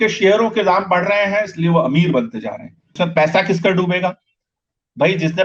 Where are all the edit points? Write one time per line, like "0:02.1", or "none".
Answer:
0:02.9